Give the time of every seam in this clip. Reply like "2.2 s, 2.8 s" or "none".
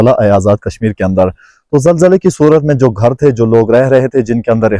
none